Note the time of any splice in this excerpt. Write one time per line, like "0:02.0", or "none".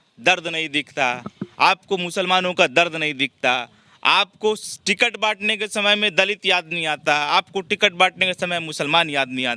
none